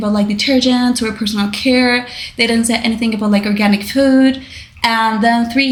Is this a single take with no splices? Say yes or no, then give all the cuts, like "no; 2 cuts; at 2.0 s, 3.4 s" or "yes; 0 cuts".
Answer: yes; 0 cuts